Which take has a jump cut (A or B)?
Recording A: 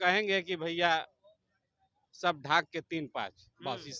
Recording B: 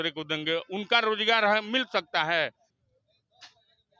B